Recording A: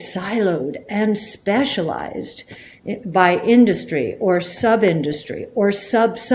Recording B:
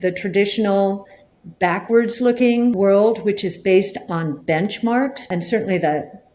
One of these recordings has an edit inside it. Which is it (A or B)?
B